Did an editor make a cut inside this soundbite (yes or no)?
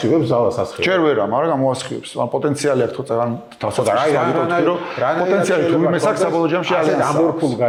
no